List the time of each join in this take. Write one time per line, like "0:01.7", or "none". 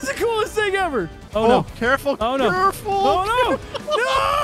0:01.2